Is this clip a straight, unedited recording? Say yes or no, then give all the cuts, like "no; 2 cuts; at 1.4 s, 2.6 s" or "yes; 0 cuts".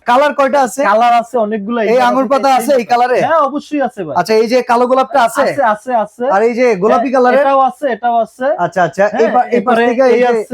yes; 0 cuts